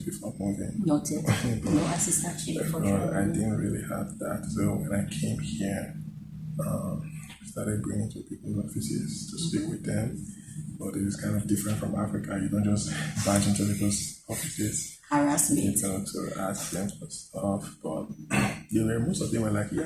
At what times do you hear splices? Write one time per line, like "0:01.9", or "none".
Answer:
none